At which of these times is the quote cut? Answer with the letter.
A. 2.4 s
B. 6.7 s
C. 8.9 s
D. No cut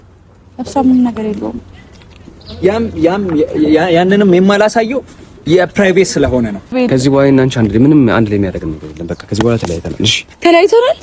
B